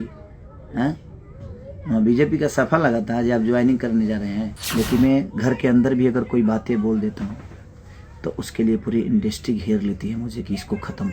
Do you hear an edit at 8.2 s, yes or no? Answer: no